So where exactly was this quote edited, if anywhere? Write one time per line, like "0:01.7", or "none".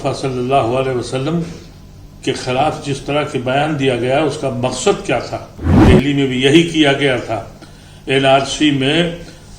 0:05.7